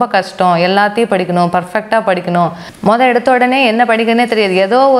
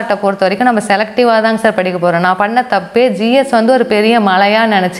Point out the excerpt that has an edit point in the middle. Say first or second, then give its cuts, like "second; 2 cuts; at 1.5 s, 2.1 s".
first; 1 cut; at 2.7 s